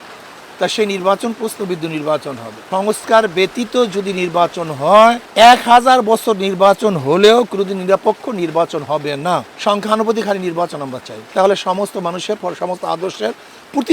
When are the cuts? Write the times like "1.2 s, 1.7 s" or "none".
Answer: 2.6 s, 9.5 s